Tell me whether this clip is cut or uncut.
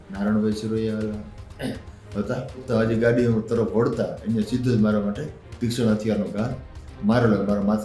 cut